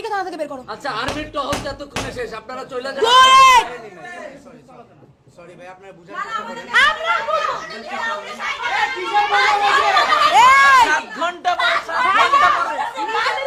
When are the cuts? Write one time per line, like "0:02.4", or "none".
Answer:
none